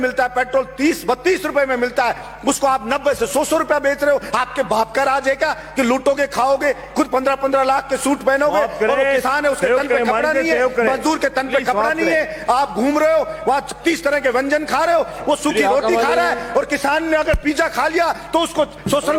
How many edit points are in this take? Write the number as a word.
zero